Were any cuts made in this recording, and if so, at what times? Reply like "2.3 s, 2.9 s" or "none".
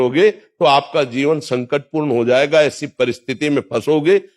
none